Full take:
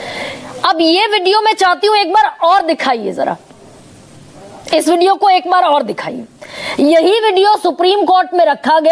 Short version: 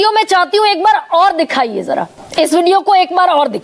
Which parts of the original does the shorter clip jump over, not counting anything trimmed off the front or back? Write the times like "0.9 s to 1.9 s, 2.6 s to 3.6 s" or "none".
3.5 s to 4.5 s

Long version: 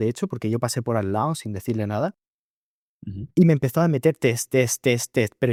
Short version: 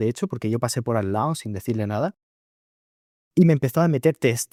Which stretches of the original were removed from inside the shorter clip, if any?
none

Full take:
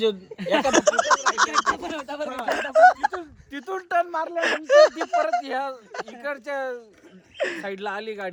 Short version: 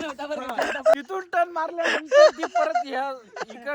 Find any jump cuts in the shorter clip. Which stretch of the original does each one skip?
2.8 s to 3.5 s

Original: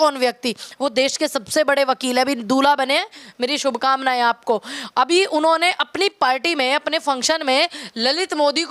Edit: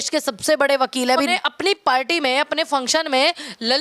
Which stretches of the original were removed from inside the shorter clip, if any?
2.4 s to 5.7 s

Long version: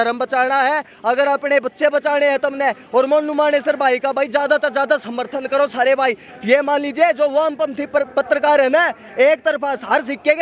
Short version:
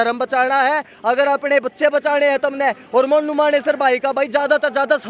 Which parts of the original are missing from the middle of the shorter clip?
none

